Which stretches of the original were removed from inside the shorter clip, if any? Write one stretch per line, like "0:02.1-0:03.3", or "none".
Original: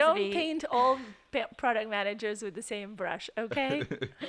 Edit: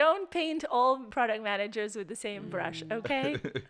0:01.1-0:01.5